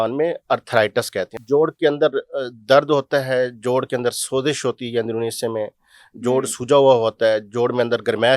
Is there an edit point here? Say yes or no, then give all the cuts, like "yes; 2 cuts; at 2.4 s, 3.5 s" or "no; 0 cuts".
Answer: yes; 1 cut; at 1.4 s